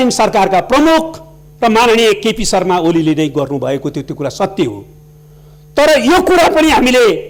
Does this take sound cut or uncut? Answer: uncut